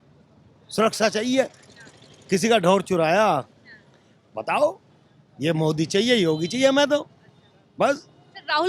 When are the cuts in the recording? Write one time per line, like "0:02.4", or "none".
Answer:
none